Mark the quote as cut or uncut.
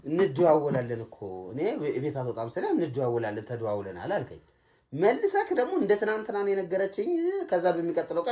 uncut